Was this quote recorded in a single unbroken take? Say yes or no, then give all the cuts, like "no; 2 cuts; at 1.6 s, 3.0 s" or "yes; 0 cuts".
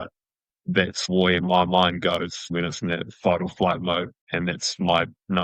no; 3 cuts; at 1.0 s, 2.5 s, 4.2 s